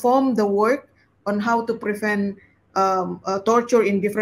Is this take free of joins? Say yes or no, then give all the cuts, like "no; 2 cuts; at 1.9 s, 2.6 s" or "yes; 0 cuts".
yes; 0 cuts